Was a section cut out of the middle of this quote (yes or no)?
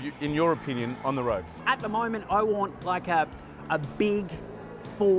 yes